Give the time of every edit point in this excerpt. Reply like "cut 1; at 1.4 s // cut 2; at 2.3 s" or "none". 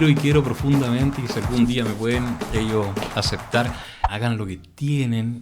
cut 1; at 4.0 s